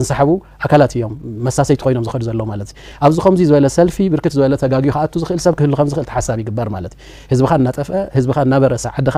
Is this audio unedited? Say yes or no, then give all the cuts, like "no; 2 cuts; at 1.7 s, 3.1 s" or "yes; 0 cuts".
yes; 0 cuts